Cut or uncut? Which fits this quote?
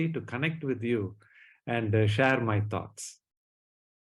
uncut